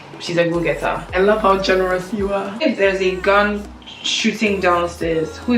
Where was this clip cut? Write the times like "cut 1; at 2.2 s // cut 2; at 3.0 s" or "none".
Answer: cut 1; at 1.1 s // cut 2; at 2.5 s